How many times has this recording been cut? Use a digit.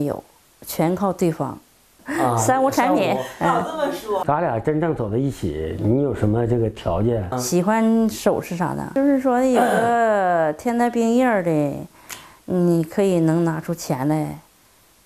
2